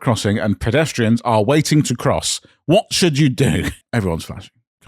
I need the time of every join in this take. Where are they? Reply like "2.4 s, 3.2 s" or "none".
3.8 s